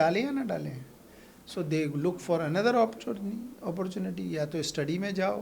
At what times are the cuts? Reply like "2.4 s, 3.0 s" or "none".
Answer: none